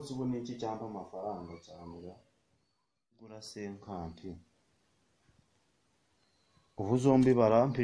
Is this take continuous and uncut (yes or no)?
no